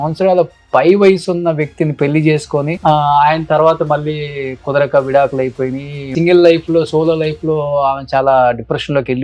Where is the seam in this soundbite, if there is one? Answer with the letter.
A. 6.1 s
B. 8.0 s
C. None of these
A